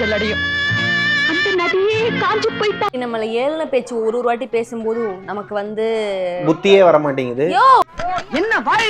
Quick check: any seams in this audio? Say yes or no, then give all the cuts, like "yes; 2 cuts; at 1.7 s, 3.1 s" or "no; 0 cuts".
yes; 2 cuts; at 2.9 s, 7.9 s